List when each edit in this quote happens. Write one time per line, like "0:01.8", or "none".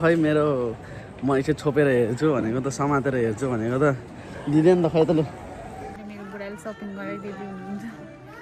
0:06.0